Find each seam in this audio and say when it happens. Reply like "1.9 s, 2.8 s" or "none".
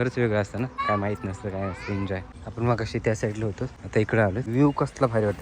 0.8 s, 2.4 s, 3.7 s, 4.5 s